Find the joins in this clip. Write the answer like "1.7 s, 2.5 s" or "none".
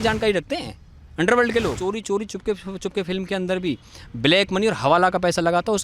1.8 s